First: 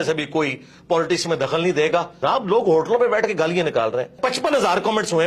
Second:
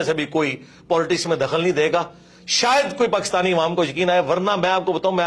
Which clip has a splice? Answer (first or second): first